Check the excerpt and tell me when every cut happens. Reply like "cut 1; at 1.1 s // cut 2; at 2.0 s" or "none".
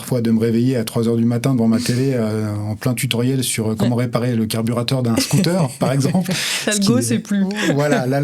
none